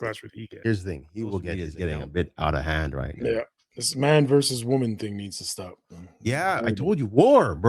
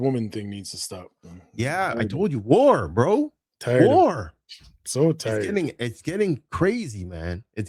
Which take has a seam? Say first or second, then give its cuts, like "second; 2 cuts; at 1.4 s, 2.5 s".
first; 1 cut; at 1.7 s